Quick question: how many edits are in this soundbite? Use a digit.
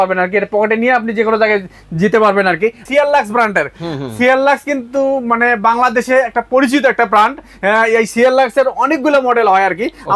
1